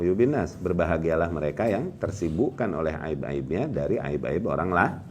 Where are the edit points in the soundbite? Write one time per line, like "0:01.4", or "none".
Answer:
none